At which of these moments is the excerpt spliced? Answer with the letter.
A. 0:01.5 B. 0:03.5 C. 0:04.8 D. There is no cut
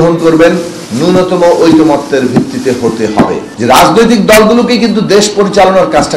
B